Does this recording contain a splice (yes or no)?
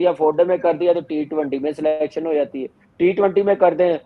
no